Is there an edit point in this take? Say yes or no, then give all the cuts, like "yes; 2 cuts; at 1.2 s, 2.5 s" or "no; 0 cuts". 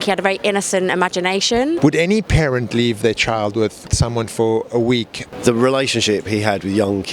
yes; 3 cuts; at 1.8 s, 3.9 s, 5.3 s